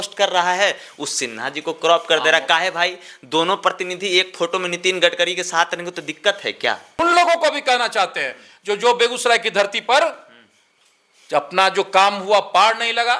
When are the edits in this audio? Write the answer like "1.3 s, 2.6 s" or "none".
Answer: 7.0 s